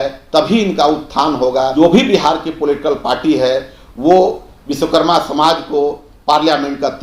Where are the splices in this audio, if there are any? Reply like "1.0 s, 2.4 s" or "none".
1.7 s